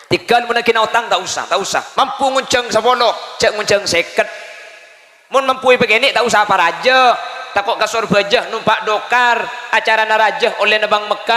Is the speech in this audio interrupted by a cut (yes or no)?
yes